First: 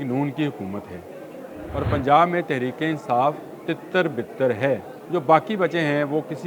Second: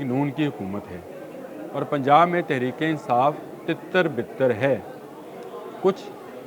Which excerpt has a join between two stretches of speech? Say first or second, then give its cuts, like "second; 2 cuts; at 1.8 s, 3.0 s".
first; 1 cut; at 4.9 s